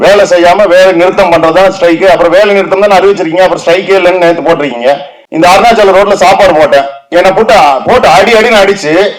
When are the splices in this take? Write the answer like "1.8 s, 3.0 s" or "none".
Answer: 5.2 s